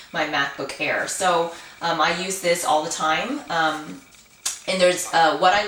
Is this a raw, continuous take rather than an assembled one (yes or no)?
yes